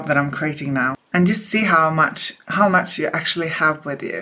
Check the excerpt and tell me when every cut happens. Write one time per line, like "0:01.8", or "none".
none